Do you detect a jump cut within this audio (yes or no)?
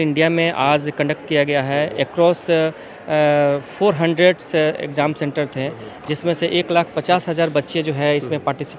no